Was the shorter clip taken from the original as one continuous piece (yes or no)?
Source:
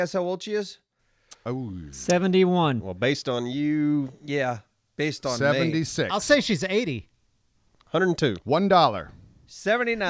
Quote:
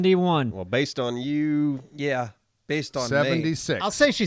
yes